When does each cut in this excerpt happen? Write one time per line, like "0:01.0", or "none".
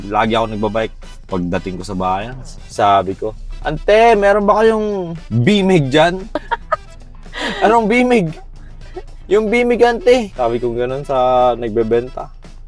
none